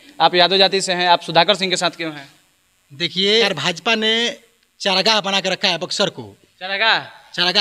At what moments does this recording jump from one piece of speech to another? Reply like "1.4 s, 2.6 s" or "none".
3.4 s